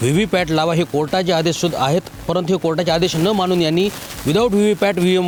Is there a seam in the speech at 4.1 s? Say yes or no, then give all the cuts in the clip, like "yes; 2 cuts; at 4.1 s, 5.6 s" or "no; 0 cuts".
no; 0 cuts